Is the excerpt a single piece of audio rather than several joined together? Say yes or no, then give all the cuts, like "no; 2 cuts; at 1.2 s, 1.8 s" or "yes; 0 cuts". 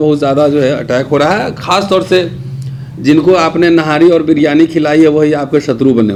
yes; 0 cuts